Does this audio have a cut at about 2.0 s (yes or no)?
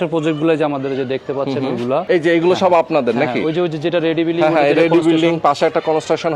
yes